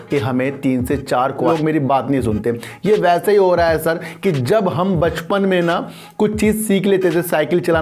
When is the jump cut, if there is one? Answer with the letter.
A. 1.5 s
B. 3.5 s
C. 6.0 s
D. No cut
A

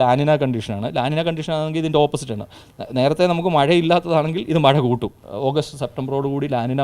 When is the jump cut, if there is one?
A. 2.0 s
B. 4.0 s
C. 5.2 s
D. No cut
C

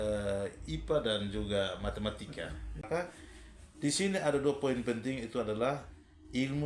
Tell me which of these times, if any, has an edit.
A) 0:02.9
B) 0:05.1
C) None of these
A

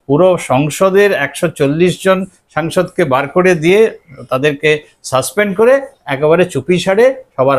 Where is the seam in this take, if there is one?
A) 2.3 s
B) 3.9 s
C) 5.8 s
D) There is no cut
D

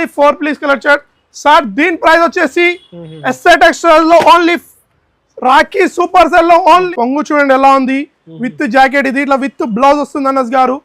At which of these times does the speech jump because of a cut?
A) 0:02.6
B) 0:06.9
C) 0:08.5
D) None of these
B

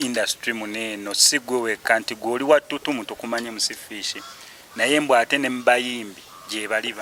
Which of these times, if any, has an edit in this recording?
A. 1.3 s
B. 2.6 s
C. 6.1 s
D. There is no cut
D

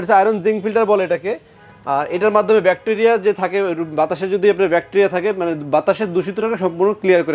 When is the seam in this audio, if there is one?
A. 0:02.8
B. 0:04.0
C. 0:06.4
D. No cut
D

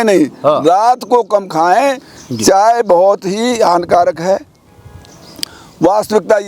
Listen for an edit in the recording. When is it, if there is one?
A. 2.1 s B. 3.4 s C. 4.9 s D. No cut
A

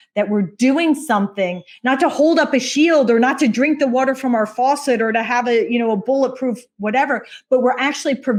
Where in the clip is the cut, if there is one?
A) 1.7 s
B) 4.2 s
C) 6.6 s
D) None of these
D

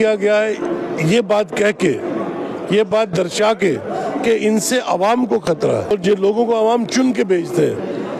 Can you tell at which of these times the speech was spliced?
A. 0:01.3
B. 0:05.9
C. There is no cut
B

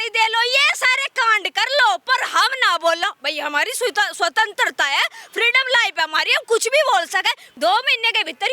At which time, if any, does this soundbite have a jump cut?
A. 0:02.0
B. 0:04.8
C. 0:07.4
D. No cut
C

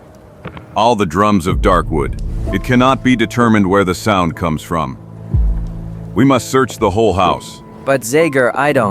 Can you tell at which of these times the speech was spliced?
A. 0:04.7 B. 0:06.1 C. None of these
B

